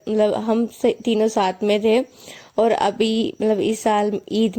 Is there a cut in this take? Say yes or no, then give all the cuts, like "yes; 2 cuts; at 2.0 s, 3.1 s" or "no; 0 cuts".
no; 0 cuts